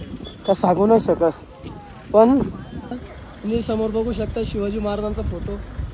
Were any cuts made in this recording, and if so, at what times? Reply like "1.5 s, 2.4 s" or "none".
3.1 s